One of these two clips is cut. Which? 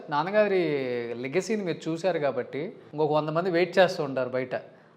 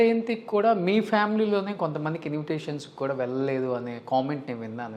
first; 1 cut; at 2.8 s

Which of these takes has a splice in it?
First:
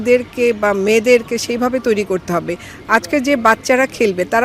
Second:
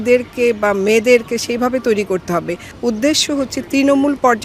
second; 1 cut; at 2.7 s

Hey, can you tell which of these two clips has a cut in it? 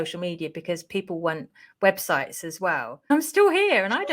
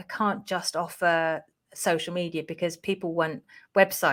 first; 1 cut; at 3.1 s

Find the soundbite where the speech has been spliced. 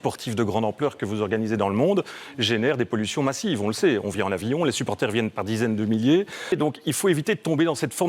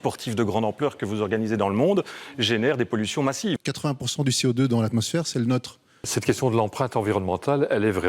second; 2 cuts; at 3.6 s, 6.0 s

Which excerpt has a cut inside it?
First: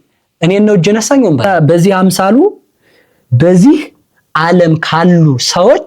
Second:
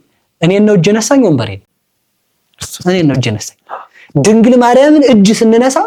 first; 1 cut; at 1.5 s

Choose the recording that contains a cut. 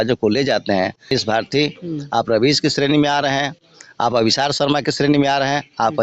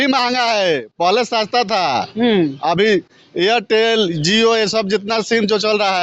first; 1 cut; at 1.1 s

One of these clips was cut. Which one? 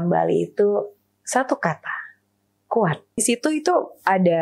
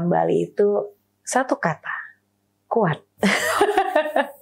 first; 1 cut; at 3.2 s

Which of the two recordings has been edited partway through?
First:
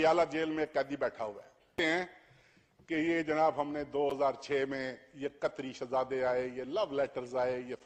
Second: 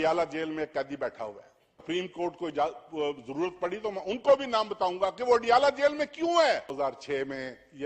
second; 2 cuts; at 1.8 s, 6.7 s

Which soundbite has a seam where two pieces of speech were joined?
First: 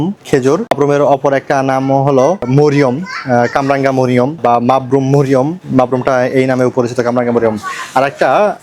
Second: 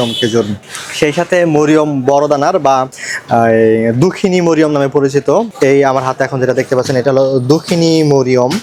first; 3 cuts; at 0.7 s, 2.5 s, 4.4 s

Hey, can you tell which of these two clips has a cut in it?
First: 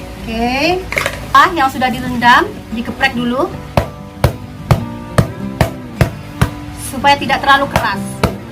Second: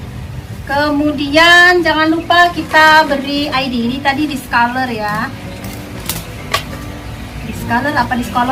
first; 1 cut; at 1.3 s

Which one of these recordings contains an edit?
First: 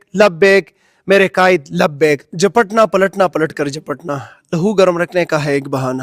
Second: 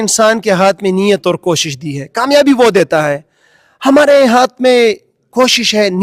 first; 1 cut; at 2.2 s

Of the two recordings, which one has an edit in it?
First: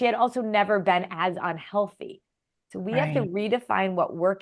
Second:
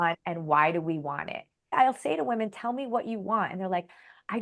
second; 1 cut; at 1.7 s

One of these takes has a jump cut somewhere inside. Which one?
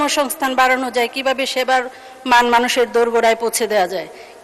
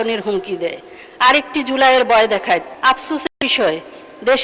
second; 1 cut; at 2.7 s

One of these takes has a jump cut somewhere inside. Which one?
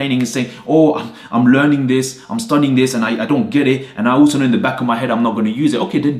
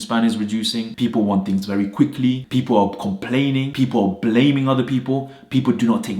second; 3 cuts; at 0.9 s, 2.4 s, 3.7 s

